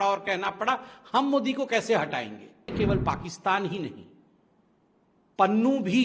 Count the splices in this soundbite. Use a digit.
1